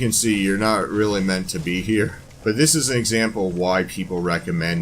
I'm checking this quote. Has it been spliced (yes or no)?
yes